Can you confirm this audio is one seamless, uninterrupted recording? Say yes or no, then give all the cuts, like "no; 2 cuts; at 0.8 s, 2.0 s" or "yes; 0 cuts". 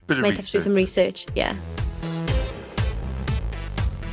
no; 1 cut; at 1.9 s